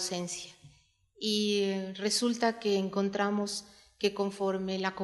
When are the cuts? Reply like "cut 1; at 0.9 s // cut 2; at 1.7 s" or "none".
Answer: cut 1; at 2.9 s